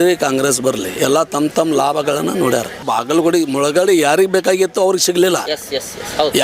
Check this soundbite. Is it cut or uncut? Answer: cut